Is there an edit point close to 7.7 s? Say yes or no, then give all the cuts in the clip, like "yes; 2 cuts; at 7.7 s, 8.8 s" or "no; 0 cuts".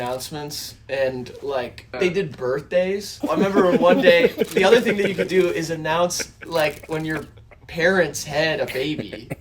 no; 2 cuts; at 2.0 s, 3.2 s